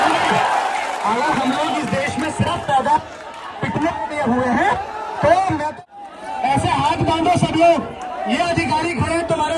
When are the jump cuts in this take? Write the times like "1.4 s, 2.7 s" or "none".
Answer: 5.7 s